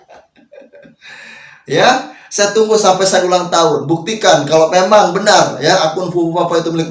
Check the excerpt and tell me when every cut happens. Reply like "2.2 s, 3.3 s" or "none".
none